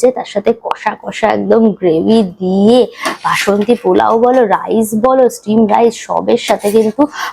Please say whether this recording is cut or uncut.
uncut